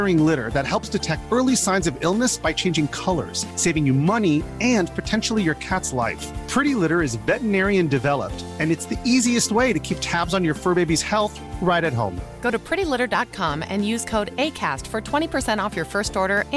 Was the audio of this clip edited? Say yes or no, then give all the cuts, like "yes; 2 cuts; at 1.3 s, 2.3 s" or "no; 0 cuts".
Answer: no; 0 cuts